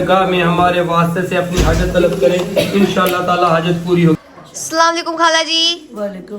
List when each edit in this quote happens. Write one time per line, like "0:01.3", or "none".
0:04.2